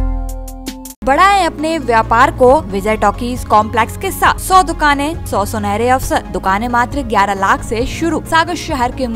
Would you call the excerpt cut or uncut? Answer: cut